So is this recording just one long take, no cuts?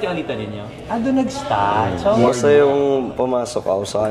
no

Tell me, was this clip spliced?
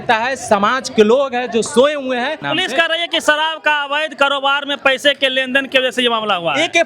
yes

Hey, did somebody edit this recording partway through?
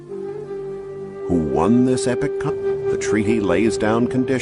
no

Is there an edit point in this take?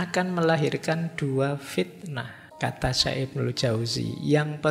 yes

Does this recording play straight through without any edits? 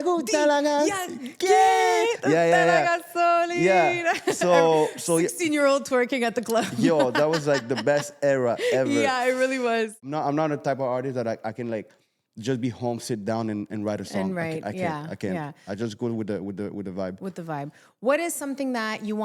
no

